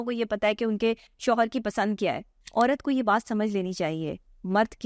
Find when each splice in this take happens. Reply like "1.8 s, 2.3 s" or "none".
2.3 s